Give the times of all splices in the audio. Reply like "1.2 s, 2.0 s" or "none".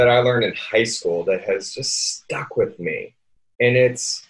none